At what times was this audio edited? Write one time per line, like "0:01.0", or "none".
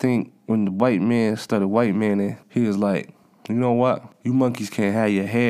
0:02.4
0:04.1